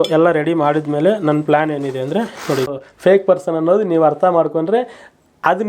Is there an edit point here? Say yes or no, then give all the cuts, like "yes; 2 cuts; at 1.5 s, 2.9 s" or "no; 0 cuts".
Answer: yes; 1 cut; at 2.7 s